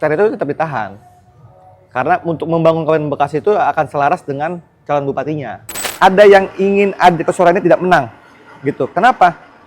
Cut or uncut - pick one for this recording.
cut